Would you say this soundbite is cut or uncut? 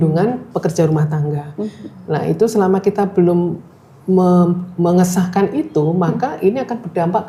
uncut